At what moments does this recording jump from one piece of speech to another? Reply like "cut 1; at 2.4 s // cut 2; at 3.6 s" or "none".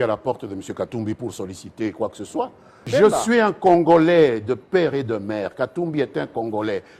cut 1; at 2.8 s